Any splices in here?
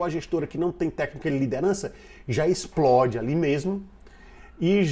no; 0 cuts

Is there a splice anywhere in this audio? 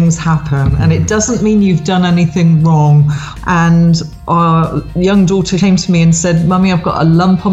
yes; 2 cuts; at 3.2 s, 5.5 s

